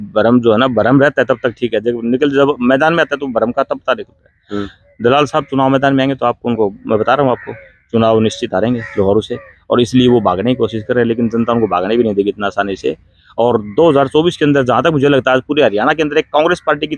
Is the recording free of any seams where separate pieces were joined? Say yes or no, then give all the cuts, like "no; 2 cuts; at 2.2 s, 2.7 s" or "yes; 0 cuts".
yes; 0 cuts